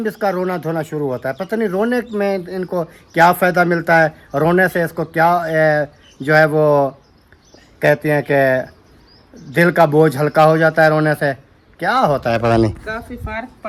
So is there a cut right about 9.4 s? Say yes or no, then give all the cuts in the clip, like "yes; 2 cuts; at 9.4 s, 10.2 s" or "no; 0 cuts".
no; 0 cuts